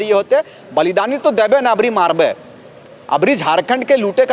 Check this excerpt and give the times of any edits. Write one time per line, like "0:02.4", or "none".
none